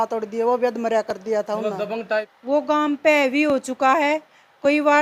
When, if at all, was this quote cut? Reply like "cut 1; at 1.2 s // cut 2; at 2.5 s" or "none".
cut 1; at 2.3 s